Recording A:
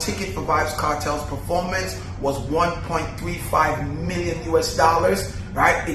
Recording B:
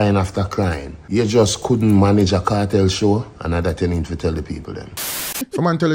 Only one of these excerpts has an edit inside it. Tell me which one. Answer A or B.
B